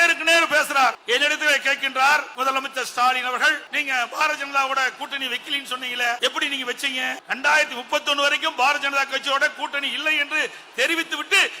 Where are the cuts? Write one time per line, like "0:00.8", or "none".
0:01.0
0:02.3
0:03.7
0:06.2
0:07.2